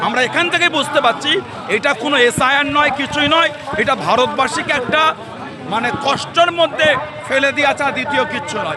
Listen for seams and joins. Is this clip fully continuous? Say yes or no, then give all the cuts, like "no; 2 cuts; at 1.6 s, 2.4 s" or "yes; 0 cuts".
yes; 0 cuts